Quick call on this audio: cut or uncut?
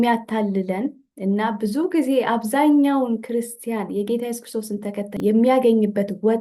cut